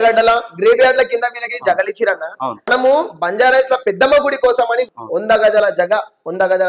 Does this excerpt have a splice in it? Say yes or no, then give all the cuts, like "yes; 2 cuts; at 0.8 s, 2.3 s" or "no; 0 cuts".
yes; 2 cuts; at 2.7 s, 4.9 s